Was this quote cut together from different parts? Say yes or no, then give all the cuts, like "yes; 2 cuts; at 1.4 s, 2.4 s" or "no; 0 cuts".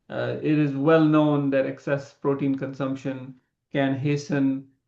no; 0 cuts